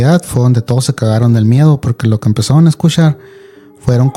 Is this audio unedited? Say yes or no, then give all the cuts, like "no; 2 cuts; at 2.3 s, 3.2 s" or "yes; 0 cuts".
yes; 0 cuts